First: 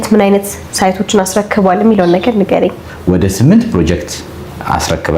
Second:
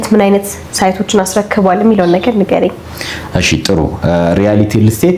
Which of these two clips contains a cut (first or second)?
first